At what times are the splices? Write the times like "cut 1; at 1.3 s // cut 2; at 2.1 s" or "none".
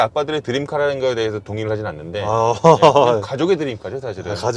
none